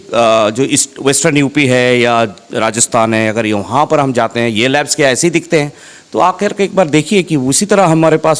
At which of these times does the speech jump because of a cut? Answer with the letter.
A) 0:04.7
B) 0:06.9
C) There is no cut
C